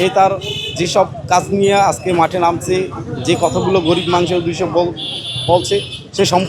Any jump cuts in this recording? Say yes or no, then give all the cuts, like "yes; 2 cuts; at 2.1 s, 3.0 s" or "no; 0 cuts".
no; 0 cuts